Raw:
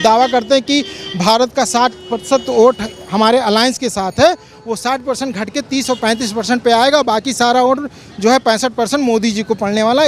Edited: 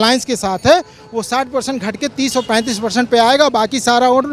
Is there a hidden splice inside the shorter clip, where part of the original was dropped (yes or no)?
no